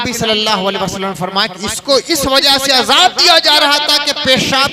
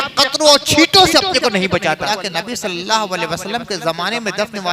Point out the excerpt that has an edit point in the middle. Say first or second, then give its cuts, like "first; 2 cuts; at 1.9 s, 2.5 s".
second; 1 cut; at 2.0 s